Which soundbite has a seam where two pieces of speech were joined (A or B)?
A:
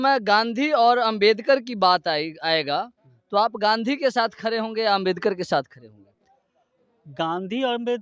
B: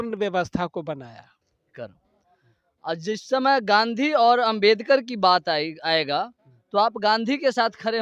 B